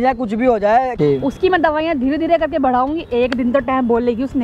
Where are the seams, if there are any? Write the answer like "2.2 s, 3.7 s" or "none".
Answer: 0.9 s

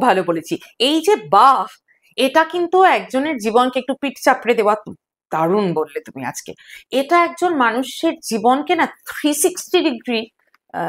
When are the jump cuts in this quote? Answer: none

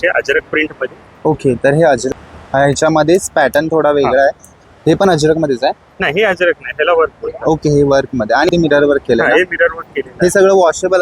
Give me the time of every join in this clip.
2.1 s, 4.5 s, 8.5 s

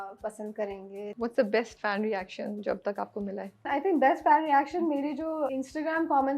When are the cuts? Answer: 1.1 s, 1.7 s, 3.7 s, 5.5 s

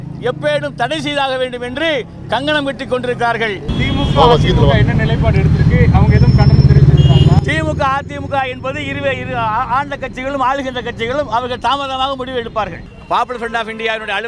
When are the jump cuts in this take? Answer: 3.6 s, 12.8 s

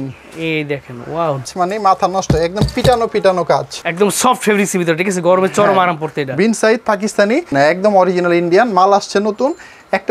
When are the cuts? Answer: 1.5 s, 3.8 s, 7.5 s

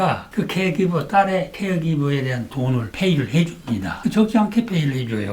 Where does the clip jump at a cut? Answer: 3.9 s

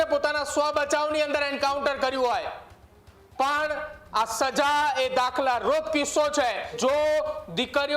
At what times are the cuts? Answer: 6.8 s

